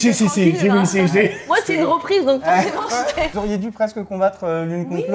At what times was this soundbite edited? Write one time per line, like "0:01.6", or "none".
0:03.3

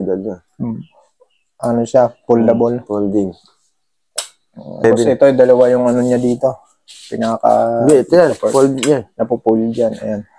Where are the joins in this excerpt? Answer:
0:04.8

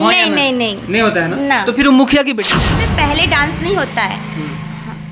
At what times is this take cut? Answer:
0:02.8

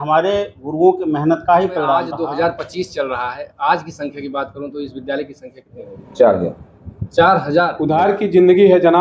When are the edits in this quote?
0:02.1
0:07.8

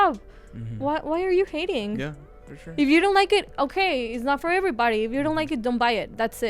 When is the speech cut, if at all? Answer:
none

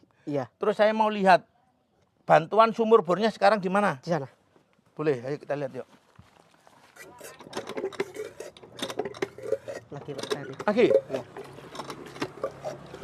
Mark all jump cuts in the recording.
0:06.9

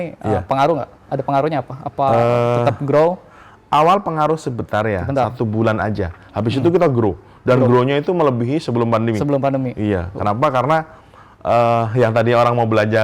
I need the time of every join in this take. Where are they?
none

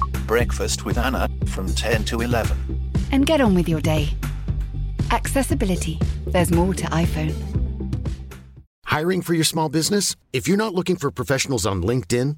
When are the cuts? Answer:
0:08.7

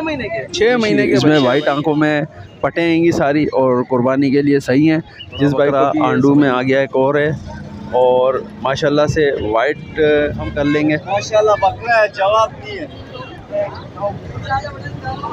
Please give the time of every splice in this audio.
0:01.1
0:05.7
0:10.5

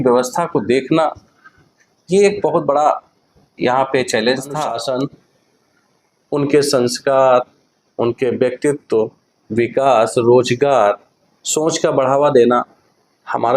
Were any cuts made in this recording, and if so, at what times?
0:04.7

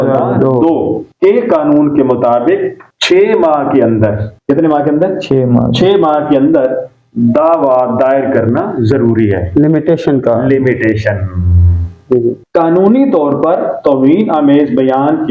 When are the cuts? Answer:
none

